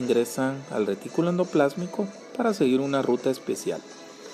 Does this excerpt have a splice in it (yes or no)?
yes